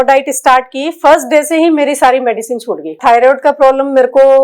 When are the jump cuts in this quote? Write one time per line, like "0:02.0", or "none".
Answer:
0:03.0